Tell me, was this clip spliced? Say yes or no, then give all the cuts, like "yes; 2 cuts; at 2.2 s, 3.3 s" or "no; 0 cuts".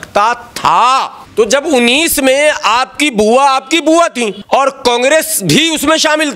yes; 2 cuts; at 1.2 s, 4.4 s